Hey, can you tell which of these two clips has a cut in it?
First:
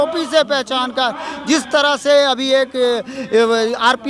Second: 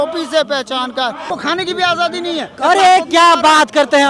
second; 1 cut; at 1.3 s

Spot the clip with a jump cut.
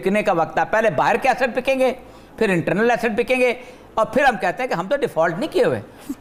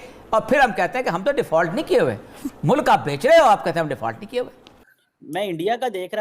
second; 1 cut; at 4.8 s

